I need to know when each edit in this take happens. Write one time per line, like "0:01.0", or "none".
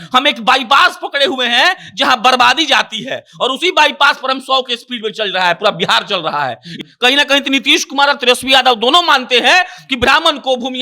0:06.7